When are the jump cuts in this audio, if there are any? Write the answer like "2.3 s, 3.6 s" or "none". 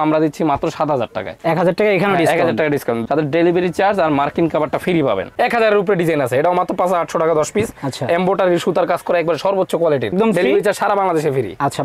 3.0 s, 5.3 s, 10.1 s